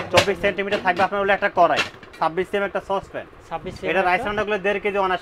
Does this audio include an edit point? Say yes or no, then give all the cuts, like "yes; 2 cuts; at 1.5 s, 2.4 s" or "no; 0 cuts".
yes; 1 cut; at 2.1 s